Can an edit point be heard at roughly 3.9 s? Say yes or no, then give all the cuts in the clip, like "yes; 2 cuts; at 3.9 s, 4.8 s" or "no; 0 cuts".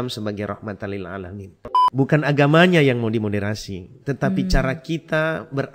no; 1 cut; at 1.5 s